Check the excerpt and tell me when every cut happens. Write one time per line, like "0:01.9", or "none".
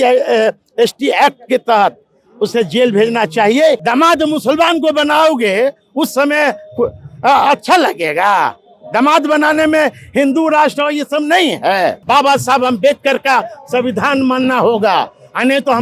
0:03.8
0:12.0